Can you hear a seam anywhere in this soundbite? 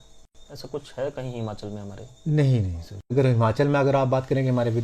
yes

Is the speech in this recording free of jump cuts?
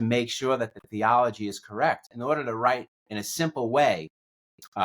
no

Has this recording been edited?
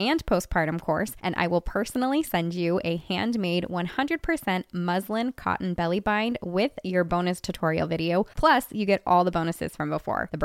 no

